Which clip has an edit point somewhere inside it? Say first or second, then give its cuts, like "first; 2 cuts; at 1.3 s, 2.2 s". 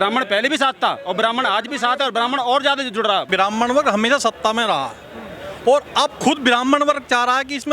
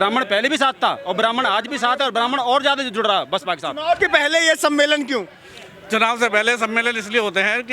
first; 1 cut; at 3.3 s